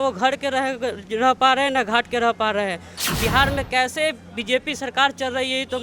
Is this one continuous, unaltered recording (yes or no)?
no